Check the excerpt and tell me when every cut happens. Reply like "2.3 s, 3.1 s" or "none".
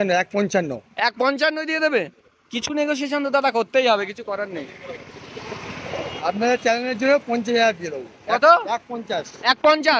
none